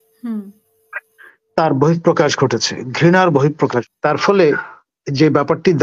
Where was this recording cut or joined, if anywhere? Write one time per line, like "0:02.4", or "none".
0:03.9